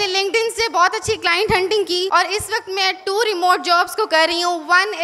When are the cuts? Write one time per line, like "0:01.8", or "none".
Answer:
0:02.1